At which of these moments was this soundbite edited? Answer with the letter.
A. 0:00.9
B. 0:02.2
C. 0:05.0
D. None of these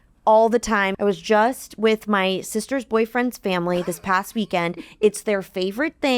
A